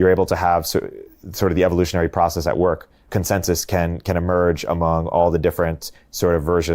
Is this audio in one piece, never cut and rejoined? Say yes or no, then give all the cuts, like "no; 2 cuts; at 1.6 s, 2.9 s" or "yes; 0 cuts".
no; 1 cut; at 3.0 s